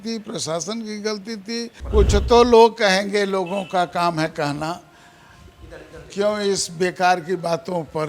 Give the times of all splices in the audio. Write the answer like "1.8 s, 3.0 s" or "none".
1.8 s